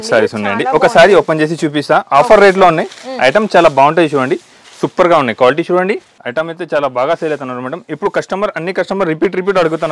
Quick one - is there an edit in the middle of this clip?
yes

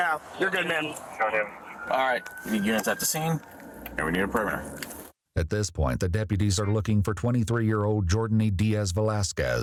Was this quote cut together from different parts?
no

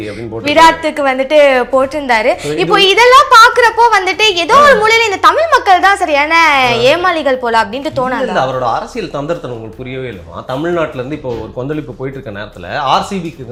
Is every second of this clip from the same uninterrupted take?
yes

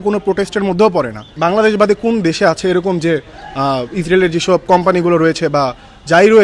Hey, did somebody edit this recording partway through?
yes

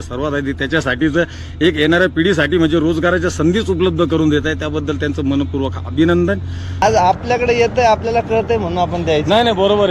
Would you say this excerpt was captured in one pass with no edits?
no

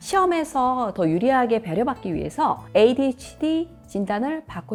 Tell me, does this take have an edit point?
no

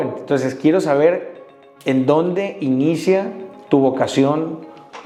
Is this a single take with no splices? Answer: yes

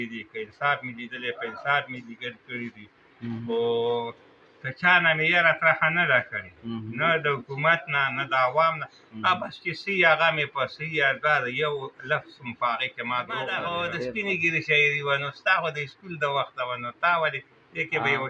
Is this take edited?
yes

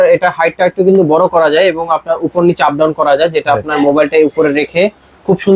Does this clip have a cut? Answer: no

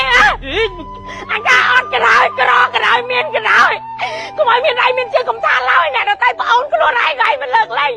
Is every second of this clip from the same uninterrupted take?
yes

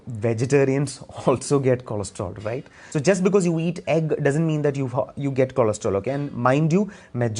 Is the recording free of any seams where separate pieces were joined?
no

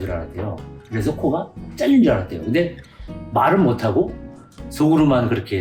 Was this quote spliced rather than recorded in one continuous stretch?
no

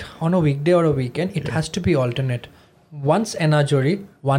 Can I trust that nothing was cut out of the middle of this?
yes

